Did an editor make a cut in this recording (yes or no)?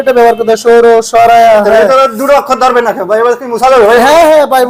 no